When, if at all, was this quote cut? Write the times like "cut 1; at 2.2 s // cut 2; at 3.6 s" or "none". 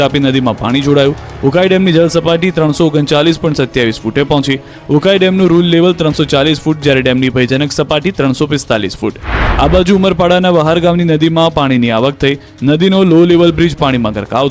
cut 1; at 12.5 s